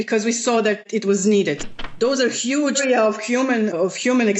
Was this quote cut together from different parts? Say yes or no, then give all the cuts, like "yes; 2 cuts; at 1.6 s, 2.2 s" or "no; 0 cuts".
yes; 2 cuts; at 1.7 s, 2.8 s